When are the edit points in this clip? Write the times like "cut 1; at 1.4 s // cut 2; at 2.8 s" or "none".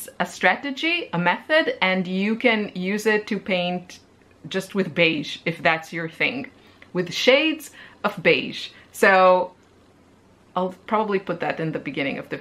none